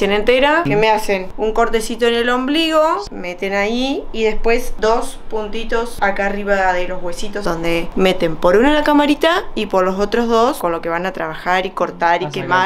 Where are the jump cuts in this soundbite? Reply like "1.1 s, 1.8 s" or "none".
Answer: 0.8 s, 3.1 s, 4.7 s, 5.9 s, 7.5 s, 10.6 s